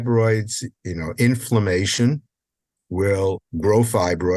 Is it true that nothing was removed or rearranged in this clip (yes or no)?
no